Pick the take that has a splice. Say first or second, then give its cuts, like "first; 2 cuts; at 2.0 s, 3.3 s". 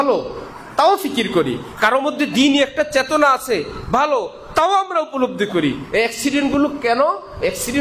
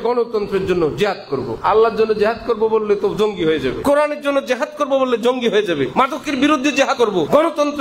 second; 4 cuts; at 1.6 s, 3.8 s, 5.9 s, 7.1 s